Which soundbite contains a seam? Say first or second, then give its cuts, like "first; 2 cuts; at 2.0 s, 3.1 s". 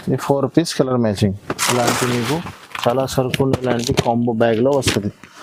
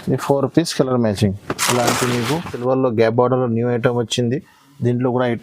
second; 1 cut; at 2.5 s